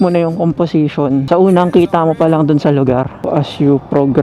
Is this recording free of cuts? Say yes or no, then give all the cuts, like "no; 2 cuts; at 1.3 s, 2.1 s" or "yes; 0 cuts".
no; 2 cuts; at 1.2 s, 3.2 s